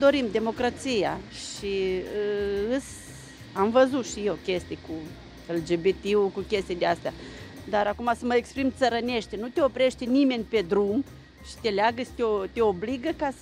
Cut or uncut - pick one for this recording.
uncut